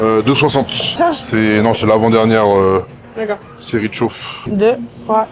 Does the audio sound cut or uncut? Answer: cut